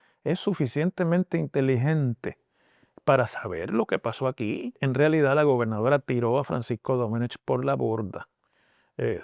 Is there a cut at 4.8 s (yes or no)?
yes